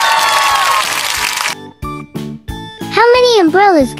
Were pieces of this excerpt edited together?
no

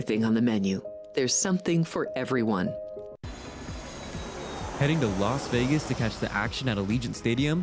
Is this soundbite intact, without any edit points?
no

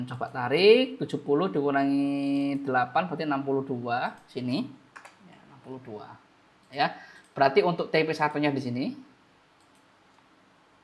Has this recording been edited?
no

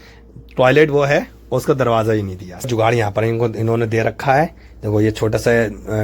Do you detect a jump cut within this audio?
yes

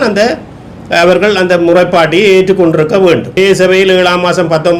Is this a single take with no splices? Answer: no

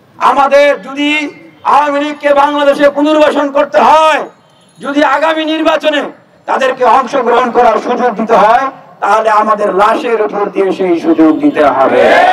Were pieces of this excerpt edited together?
no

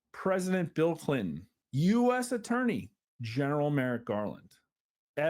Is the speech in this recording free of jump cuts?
no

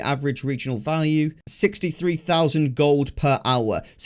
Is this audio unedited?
no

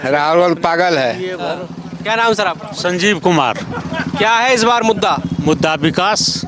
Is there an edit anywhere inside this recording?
no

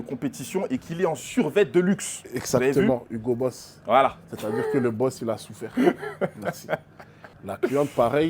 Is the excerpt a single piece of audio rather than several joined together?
yes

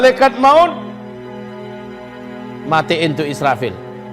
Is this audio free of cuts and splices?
no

